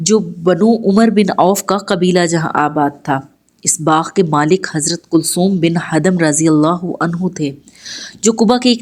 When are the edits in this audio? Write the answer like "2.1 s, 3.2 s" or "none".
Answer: none